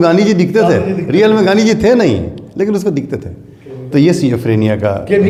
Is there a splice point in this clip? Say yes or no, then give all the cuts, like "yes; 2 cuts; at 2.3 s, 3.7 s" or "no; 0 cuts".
no; 0 cuts